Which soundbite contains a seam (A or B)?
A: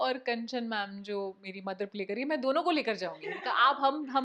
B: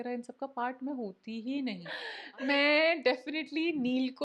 B